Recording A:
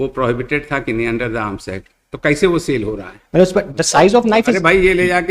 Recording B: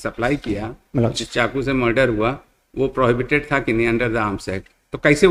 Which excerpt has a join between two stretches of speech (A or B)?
A